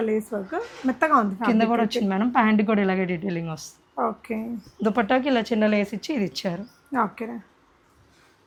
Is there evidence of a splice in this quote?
no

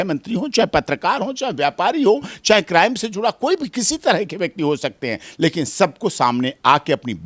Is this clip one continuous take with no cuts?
yes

